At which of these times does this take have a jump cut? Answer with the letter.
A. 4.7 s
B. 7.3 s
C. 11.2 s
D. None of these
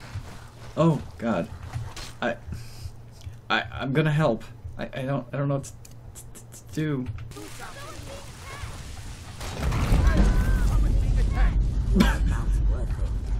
B